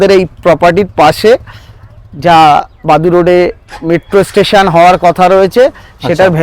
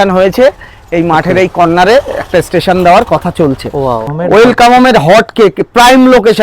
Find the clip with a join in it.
second; 1 cut; at 4.1 s

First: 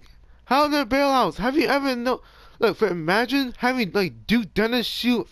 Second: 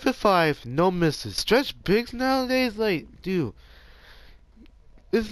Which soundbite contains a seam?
second; 1 cut; at 1.4 s

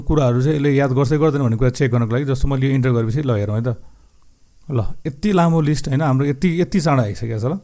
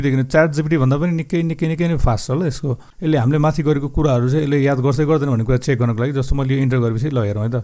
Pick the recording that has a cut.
second; 1 cut; at 2.9 s

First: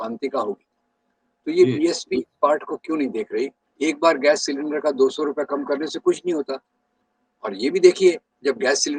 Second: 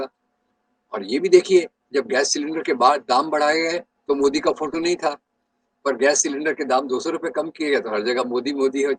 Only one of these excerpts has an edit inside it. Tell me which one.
first; 1 cut; at 3.6 s

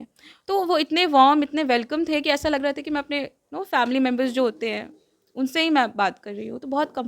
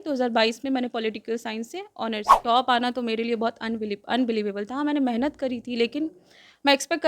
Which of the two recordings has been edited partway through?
second; 1 cut; at 2.3 s

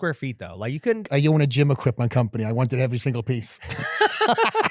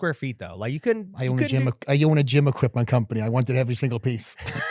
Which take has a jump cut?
first; 1 cut; at 1.0 s

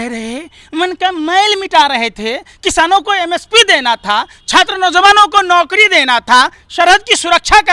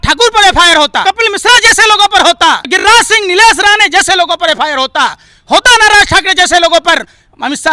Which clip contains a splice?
second; 2 cuts; at 1.0 s, 2.7 s

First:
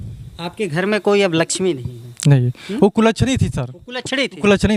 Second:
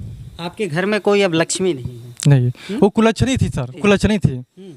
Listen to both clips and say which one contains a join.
second; 1 cut; at 3.7 s

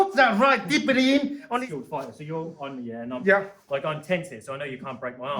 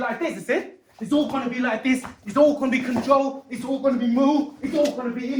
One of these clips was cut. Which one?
first; 1 cut; at 1.5 s

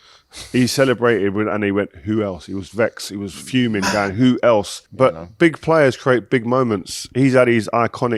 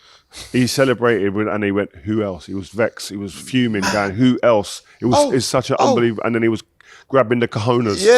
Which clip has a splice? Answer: first; 1 cut; at 4.8 s

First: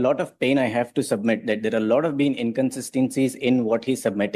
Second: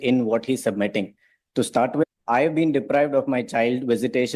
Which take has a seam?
second; 1 cut; at 2.1 s

